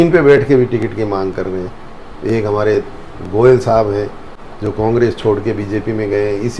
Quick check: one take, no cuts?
yes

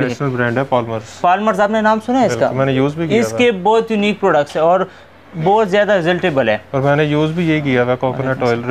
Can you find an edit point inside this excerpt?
no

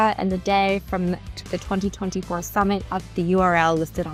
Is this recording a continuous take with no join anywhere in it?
yes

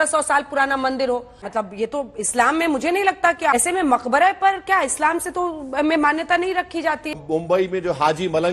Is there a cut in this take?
yes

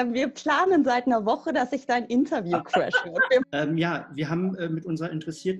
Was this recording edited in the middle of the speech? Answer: yes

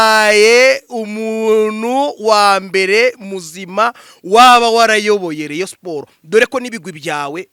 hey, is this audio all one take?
yes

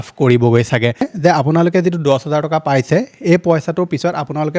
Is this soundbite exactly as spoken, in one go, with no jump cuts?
no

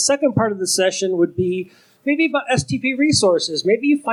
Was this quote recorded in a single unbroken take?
yes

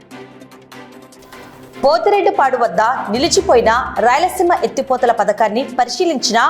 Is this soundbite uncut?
no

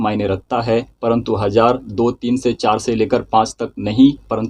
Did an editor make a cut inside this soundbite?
no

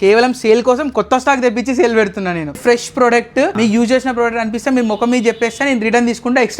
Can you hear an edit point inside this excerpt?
yes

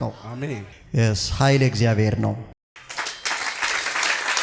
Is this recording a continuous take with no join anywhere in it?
yes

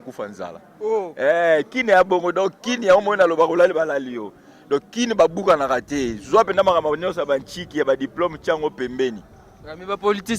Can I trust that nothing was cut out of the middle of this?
yes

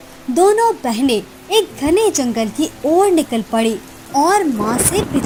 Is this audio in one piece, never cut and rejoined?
yes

